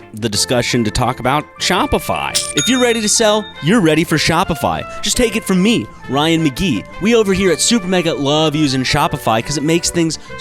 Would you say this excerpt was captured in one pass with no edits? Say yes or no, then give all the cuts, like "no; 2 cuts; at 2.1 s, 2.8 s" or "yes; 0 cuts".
no; 1 cut; at 2.5 s